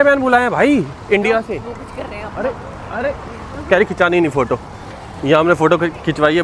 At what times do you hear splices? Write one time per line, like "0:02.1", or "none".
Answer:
none